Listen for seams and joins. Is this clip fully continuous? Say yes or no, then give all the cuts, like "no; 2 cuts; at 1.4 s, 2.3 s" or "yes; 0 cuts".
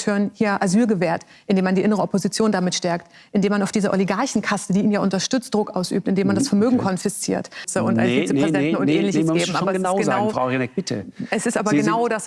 no; 1 cut; at 7.7 s